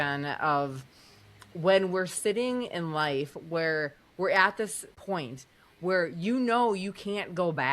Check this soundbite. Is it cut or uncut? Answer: cut